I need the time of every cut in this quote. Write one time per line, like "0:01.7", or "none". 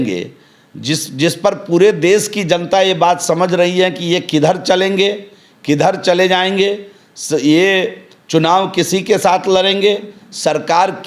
none